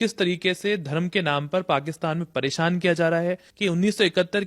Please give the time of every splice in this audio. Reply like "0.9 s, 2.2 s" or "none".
3.5 s